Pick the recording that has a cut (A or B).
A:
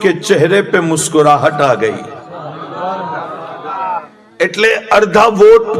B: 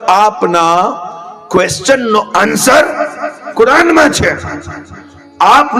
A